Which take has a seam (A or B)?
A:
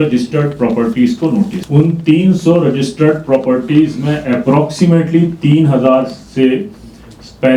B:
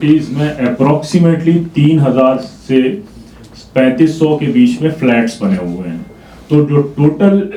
A